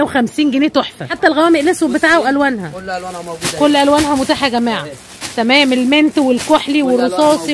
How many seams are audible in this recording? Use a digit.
1